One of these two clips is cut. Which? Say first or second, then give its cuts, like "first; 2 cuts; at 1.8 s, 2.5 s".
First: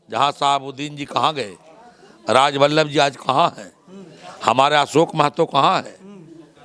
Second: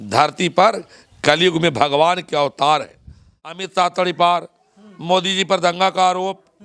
second; 1 cut; at 3.6 s